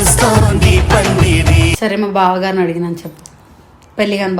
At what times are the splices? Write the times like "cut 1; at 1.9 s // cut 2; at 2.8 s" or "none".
cut 1; at 1.7 s